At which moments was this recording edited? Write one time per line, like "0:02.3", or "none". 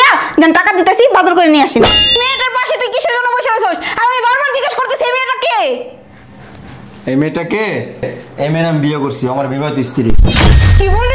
0:02.0